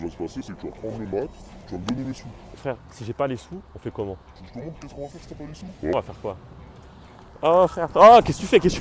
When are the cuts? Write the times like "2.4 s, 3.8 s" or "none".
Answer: 2.6 s, 4.3 s